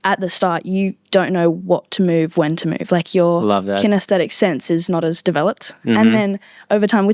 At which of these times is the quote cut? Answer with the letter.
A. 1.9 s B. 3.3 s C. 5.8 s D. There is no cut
D